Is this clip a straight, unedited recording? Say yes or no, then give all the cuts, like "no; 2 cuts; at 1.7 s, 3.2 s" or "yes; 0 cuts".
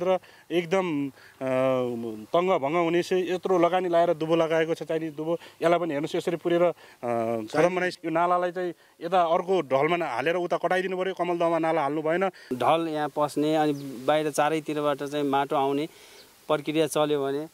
no; 2 cuts; at 8.0 s, 12.5 s